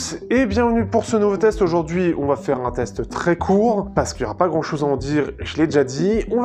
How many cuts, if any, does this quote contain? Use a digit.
1